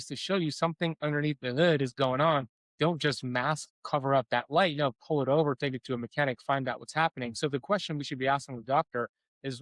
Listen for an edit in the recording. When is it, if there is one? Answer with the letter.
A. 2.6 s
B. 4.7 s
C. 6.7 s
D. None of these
A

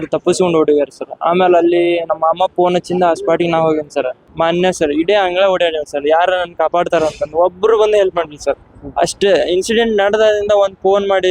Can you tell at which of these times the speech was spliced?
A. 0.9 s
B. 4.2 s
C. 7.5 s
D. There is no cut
B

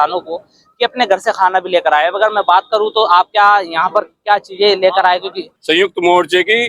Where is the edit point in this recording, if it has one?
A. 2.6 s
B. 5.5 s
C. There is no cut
B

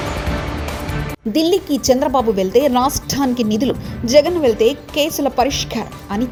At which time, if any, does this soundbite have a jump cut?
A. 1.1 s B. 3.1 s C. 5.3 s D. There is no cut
D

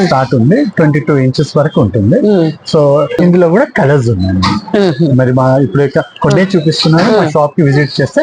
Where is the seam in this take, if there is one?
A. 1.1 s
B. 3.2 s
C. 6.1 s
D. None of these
B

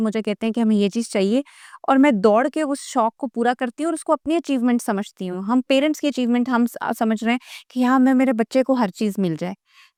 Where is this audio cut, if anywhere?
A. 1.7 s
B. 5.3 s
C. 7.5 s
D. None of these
D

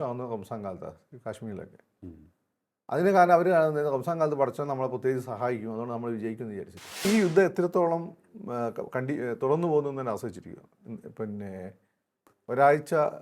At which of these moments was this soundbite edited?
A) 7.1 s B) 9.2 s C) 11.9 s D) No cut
A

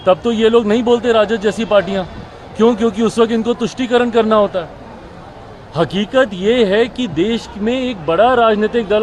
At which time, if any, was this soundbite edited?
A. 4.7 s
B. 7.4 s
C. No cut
C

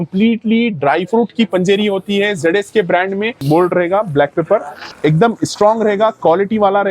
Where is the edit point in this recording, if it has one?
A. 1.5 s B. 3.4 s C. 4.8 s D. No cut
B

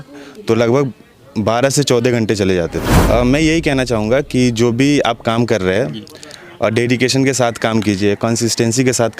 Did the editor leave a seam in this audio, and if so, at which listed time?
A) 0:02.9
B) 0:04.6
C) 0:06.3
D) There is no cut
A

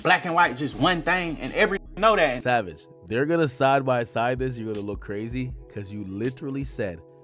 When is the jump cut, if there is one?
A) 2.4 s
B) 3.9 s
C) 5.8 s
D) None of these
A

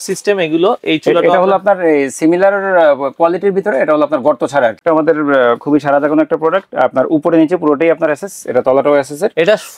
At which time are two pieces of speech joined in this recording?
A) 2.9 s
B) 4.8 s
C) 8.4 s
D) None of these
B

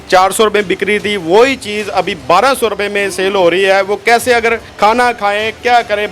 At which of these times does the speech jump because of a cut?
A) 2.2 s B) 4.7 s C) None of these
B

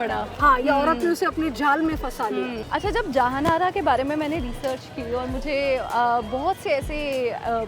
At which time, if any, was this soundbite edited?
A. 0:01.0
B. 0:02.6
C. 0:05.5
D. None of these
B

